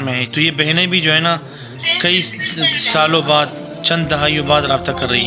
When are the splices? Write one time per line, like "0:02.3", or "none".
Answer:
none